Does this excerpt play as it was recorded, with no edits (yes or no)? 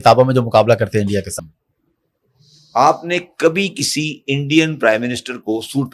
no